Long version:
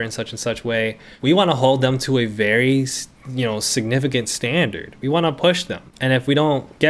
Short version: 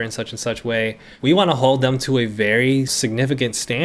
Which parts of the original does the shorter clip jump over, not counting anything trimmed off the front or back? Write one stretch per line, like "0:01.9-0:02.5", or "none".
0:02.9-0:03.7